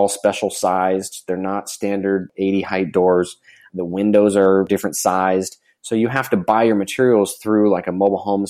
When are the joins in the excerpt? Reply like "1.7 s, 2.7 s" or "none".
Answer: 4.7 s